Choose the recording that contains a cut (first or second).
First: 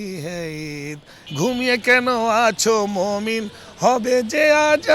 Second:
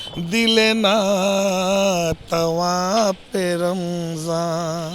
first